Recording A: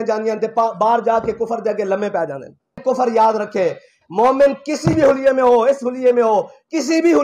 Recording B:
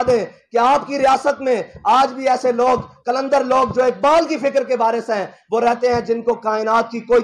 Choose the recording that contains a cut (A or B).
A